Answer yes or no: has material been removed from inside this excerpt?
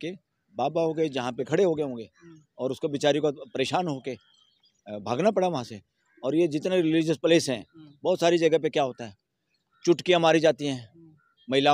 yes